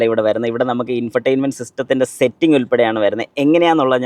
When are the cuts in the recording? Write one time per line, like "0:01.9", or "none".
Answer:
none